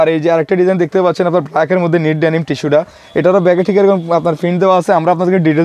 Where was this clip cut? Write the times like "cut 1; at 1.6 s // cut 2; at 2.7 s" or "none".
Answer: none